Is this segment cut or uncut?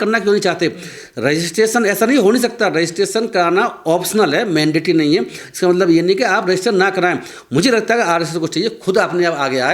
uncut